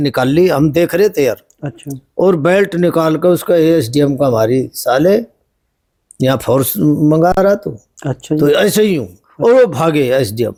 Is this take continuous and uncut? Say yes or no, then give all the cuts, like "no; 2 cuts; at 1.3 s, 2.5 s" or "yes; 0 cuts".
yes; 0 cuts